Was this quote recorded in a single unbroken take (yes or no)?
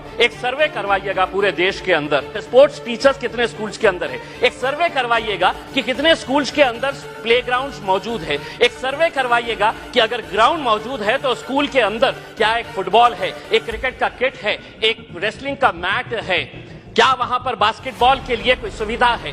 no